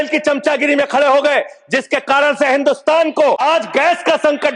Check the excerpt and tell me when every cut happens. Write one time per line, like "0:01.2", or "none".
0:03.4